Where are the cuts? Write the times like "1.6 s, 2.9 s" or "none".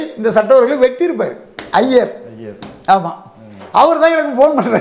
none